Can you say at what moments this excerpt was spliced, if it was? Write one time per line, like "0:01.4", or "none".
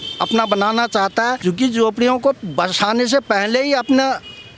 0:01.4

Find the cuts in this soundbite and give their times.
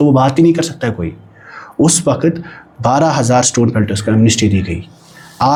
none

